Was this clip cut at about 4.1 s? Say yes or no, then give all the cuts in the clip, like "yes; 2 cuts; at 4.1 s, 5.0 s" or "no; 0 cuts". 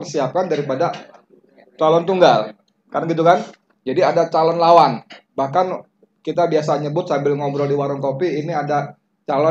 no; 0 cuts